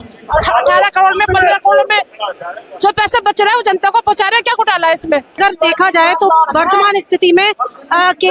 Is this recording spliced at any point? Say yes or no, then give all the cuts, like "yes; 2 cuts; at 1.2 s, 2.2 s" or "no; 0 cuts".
yes; 1 cut; at 5.4 s